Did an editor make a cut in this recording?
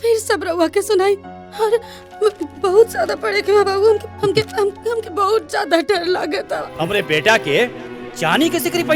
yes; 1 cut; at 6.7 s

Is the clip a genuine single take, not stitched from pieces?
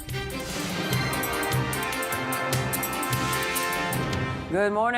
no; 1 cut; at 3.0 s

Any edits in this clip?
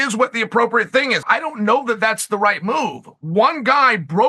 yes; 1 cut; at 1.2 s

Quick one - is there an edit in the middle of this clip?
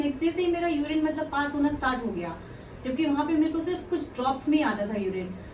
no; 0 cuts

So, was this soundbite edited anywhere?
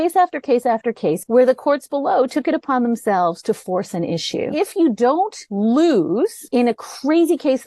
yes; 4 cuts; at 1.2 s, 4.5 s, 5.4 s, 6.4 s

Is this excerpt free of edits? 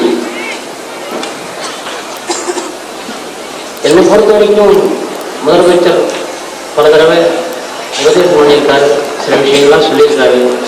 yes; 0 cuts

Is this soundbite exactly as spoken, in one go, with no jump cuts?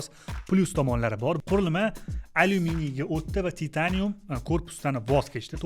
no; 1 cut; at 1.4 s

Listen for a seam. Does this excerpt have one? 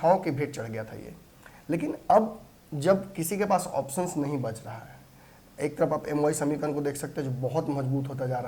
no; 0 cuts

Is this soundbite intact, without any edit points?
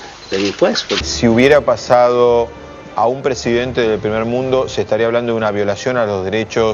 no; 1 cut; at 1.0 s

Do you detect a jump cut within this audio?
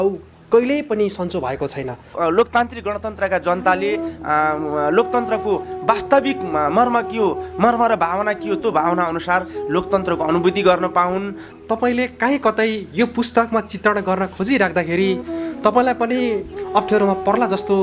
yes; 2 cuts; at 2.1 s, 11.4 s

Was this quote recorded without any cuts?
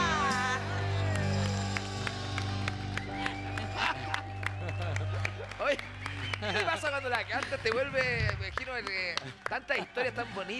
yes; 0 cuts

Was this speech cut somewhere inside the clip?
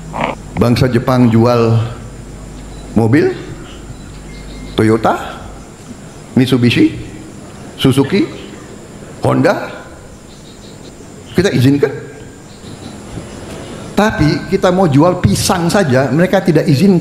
yes; 2 cuts; at 10.9 s, 12.6 s

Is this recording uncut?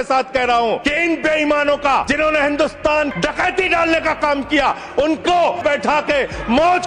no; 4 cuts; at 0.8 s, 2.1 s, 3.1 s, 5.6 s

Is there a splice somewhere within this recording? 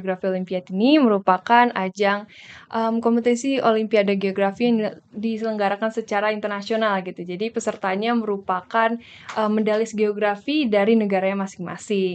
no; 0 cuts

